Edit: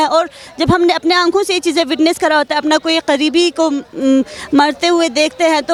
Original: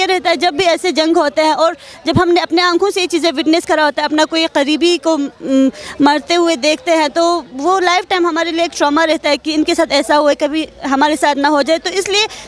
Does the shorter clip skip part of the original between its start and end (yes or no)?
no